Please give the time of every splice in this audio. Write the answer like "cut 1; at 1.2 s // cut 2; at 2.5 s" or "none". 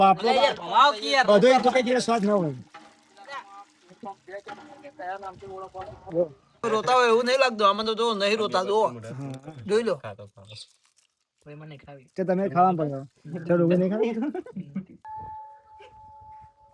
cut 1; at 6.7 s // cut 2; at 15.0 s